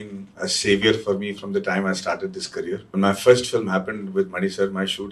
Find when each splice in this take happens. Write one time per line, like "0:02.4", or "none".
0:02.9